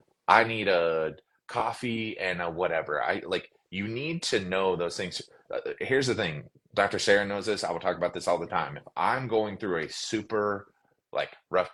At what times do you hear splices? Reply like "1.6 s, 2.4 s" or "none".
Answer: none